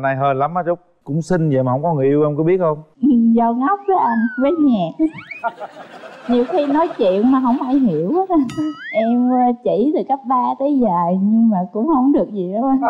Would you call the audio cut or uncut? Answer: cut